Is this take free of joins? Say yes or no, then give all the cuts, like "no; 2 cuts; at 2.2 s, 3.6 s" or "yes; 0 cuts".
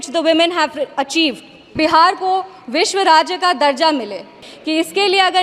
no; 2 cuts; at 1.7 s, 4.4 s